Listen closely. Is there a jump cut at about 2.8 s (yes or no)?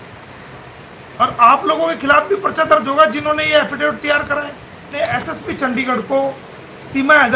no